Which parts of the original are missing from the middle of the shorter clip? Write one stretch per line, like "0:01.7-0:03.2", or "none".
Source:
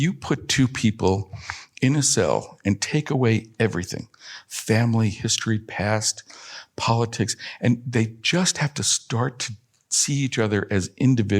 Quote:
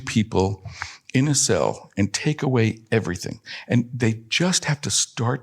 0:04.2-0:07.4